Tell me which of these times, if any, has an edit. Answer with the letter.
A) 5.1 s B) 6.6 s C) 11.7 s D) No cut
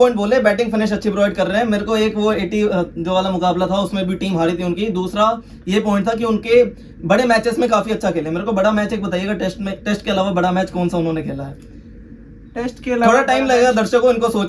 D